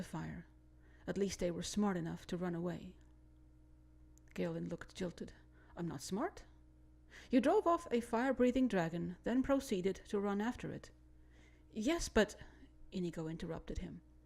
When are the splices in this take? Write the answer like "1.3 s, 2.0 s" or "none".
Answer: 4.4 s